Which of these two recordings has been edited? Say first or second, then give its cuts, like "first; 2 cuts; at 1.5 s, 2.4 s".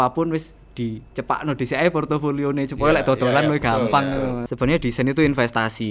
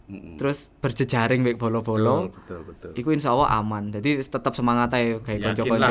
first; 1 cut; at 4.4 s